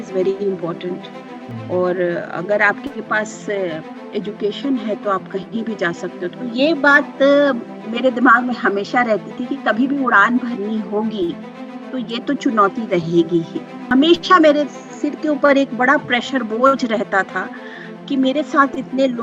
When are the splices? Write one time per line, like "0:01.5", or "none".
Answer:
0:06.4
0:13.8